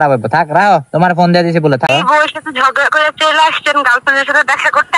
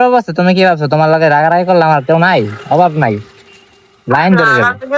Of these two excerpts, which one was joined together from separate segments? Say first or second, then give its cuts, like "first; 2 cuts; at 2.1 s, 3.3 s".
first; 1 cut; at 1.9 s